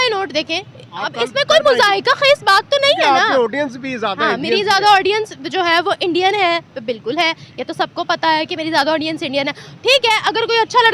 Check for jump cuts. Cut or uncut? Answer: uncut